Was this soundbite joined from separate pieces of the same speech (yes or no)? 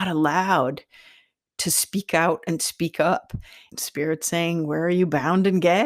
yes